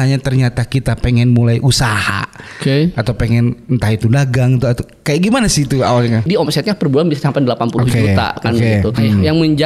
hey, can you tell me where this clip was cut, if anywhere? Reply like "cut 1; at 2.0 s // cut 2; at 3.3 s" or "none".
cut 1; at 6.3 s // cut 2; at 9.0 s

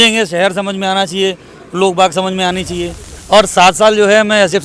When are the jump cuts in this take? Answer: cut 1; at 3.1 s

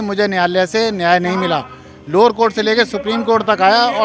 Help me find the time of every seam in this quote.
none

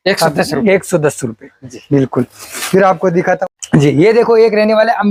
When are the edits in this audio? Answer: none

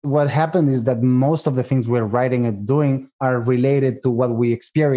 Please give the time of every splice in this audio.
cut 1; at 3.1 s

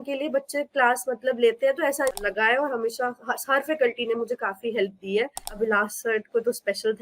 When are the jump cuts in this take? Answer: cut 1; at 2.2 s // cut 2; at 5.5 s

